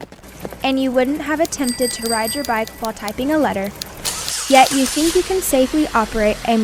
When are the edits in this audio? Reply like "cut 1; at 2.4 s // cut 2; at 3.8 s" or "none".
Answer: none